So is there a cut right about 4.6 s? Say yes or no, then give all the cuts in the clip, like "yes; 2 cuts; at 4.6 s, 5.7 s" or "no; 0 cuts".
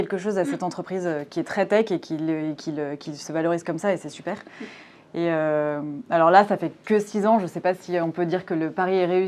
no; 0 cuts